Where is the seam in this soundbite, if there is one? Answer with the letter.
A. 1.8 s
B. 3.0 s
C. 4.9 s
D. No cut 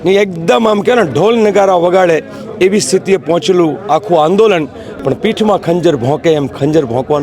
C